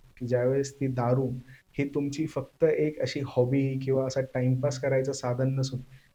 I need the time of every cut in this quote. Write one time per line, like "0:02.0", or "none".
none